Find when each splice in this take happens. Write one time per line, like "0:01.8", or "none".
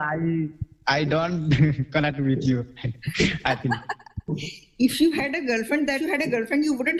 none

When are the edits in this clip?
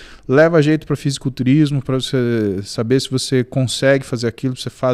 none

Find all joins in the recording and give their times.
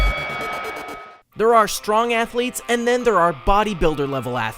0:01.0

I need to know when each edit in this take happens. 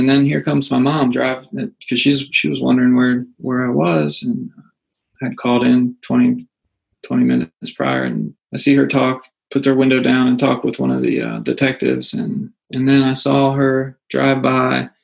0:08.4

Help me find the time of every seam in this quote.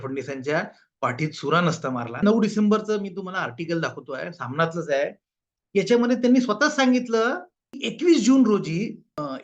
0:02.2
0:07.9

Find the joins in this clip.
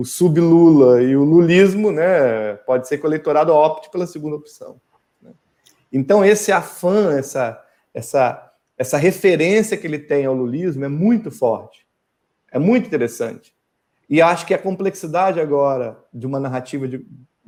none

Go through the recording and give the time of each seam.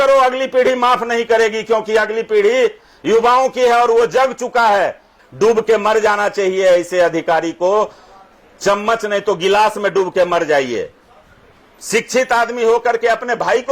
0:05.2

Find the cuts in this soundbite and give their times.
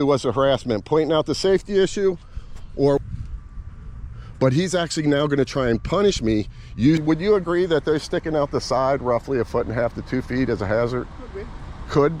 0:03.0
0:07.0

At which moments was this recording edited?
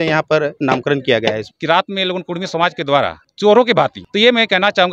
0:01.5
0:03.2
0:04.0

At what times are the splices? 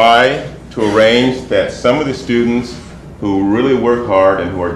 0:02.7

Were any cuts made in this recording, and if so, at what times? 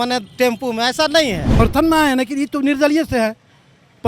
0:01.6

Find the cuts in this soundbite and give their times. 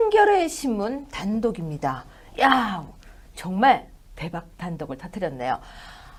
none

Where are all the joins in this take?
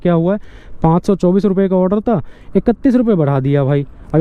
none

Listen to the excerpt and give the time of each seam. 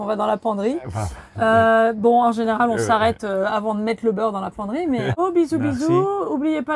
0:05.2

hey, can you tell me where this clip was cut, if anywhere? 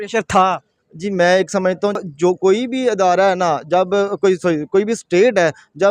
0:02.0

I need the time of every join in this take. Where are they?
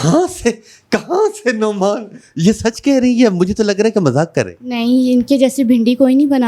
none

